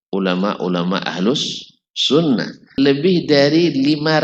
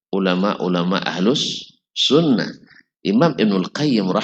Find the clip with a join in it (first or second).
first